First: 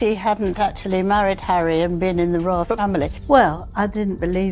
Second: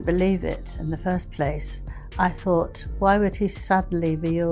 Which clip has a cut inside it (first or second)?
first